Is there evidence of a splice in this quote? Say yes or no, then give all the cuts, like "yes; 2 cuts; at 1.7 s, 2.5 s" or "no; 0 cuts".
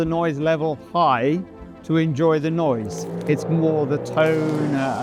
no; 0 cuts